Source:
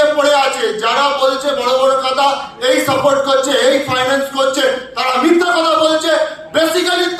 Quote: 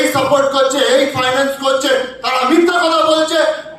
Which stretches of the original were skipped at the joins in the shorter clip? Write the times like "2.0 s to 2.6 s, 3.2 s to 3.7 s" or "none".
none